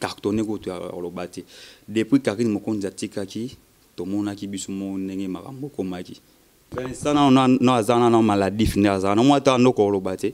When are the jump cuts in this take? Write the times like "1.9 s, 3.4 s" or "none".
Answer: 6.8 s